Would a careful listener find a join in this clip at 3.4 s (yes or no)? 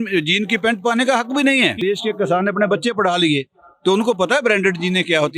no